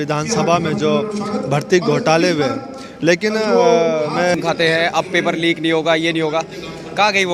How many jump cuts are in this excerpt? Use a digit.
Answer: 1